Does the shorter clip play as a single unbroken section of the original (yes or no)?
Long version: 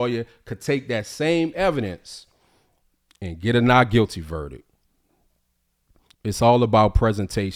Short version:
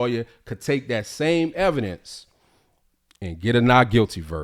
yes